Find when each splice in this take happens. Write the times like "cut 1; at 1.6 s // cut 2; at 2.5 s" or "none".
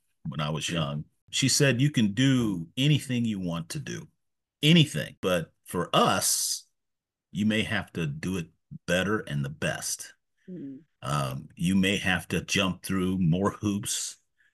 cut 1; at 1.3 s // cut 2; at 5.2 s